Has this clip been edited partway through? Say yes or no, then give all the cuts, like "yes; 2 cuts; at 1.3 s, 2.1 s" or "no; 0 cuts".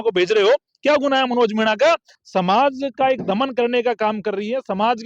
yes; 1 cut; at 2.1 s